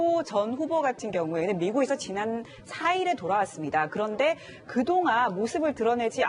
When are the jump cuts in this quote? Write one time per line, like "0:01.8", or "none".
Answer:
0:02.6